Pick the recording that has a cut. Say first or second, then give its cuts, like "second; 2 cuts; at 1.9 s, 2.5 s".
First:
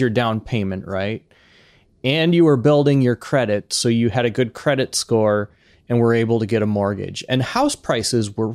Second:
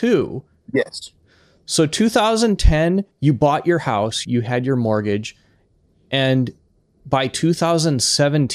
second; 2 cuts; at 3.1 s, 4.2 s